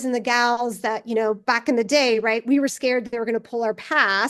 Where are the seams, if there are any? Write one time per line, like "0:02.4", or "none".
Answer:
none